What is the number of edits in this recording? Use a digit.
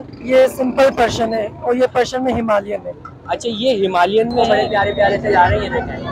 1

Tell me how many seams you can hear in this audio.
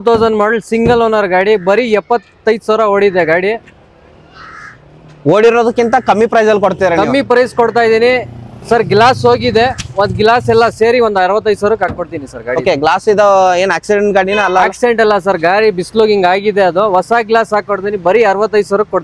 0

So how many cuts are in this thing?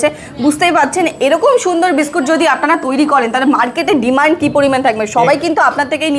0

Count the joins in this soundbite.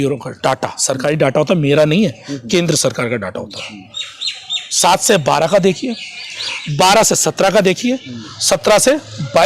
0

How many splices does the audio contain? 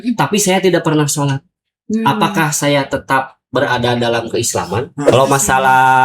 1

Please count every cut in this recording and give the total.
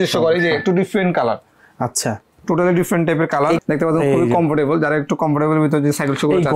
1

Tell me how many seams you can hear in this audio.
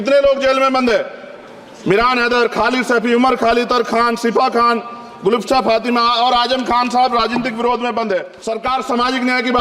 1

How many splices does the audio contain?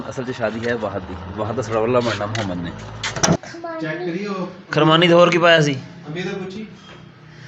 1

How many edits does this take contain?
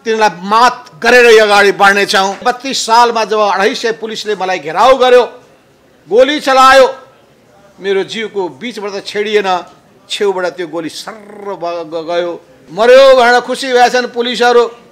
2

